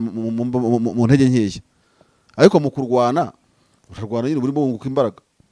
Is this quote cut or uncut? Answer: uncut